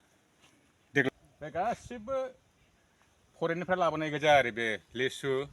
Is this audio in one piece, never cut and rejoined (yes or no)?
no